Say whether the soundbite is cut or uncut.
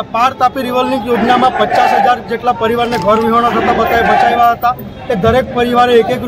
uncut